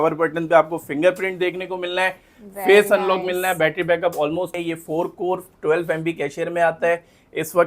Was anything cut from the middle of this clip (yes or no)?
yes